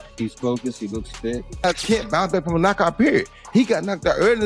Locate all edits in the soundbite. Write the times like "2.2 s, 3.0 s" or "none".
1.6 s